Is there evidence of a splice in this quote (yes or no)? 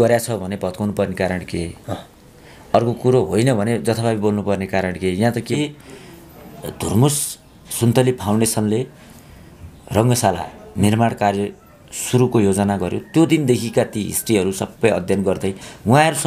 yes